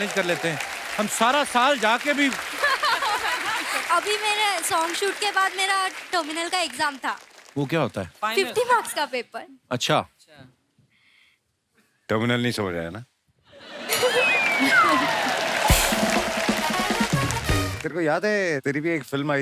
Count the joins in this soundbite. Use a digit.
1